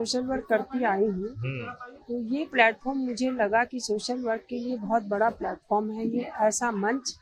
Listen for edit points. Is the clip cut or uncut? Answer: uncut